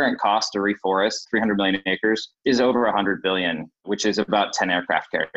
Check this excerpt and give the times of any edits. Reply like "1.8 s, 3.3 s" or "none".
1.3 s, 2.4 s, 3.7 s